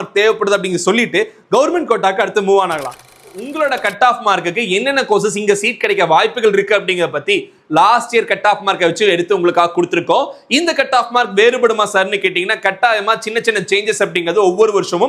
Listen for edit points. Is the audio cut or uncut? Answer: cut